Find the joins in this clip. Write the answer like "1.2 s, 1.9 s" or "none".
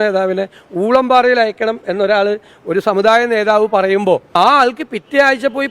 4.4 s